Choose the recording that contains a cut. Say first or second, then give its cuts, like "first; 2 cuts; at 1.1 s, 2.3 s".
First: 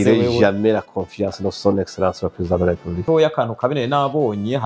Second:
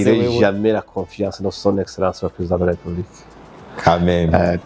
first; 1 cut; at 3.0 s